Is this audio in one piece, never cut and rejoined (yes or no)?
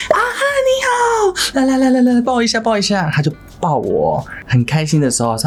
yes